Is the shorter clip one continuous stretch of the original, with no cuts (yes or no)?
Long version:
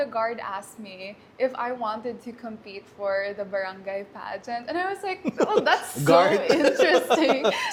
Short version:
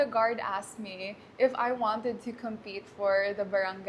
yes